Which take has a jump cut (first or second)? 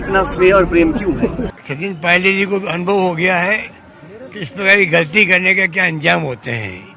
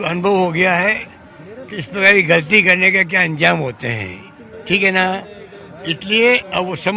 first